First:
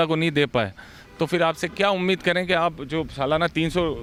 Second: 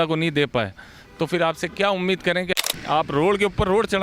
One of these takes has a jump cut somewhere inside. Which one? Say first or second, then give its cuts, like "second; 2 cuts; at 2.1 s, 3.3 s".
second; 1 cut; at 2.5 s